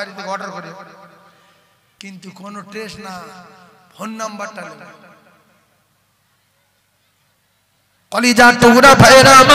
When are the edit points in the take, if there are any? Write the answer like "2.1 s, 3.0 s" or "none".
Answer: none